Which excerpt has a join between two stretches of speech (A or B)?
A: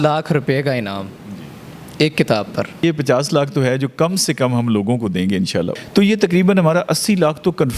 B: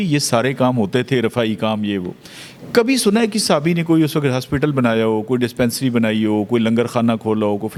A